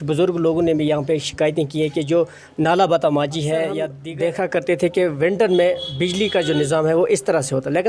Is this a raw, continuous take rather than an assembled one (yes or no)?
no